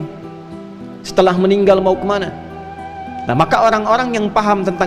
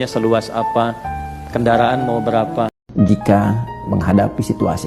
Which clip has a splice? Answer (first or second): second